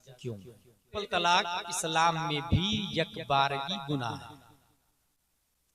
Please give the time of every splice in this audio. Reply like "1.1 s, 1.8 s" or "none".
1.0 s